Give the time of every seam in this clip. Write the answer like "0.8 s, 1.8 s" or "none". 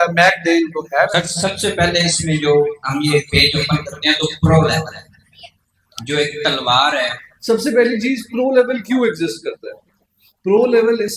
1.1 s, 7.3 s